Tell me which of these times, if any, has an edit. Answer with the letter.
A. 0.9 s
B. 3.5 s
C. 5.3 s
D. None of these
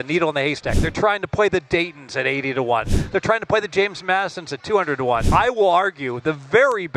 C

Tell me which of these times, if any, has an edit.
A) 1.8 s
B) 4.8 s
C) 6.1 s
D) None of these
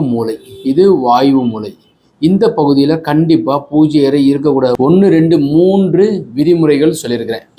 B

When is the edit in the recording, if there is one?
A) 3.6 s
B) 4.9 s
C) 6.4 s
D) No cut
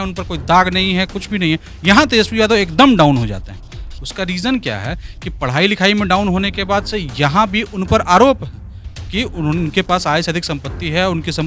D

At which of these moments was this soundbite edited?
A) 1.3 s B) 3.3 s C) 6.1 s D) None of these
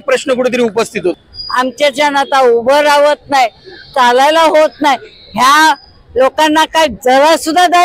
A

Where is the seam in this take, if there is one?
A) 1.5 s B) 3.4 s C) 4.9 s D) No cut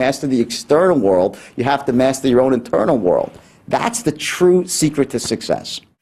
D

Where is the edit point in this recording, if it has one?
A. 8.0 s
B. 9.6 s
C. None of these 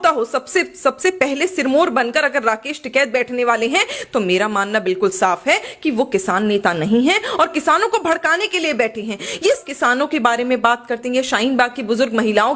B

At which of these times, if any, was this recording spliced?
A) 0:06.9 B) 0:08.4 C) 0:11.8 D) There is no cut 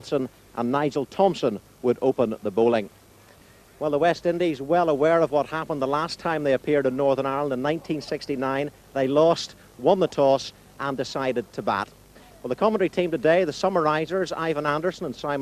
A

